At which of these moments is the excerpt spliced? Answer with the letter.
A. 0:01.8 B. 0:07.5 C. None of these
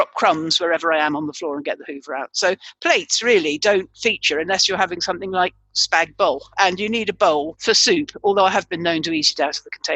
B